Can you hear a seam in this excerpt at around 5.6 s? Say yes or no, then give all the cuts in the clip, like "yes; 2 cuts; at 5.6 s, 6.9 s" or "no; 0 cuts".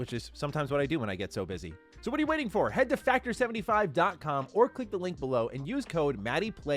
yes; 1 cut; at 5.6 s